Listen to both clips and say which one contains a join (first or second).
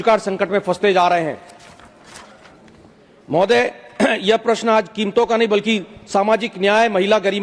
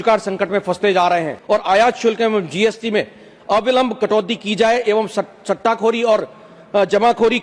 second